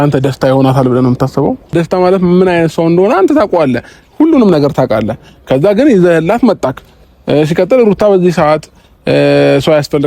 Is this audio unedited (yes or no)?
no